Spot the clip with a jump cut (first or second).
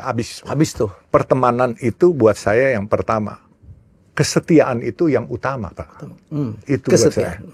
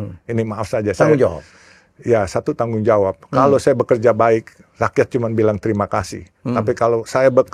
first